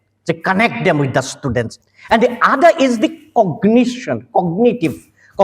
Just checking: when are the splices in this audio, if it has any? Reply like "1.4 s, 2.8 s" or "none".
1.8 s